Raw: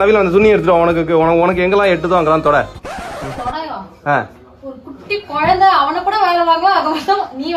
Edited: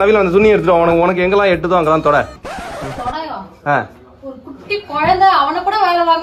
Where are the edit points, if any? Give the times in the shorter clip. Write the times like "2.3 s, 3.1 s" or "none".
0.9 s